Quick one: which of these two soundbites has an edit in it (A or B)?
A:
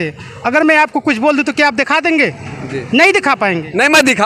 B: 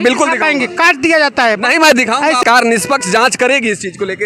B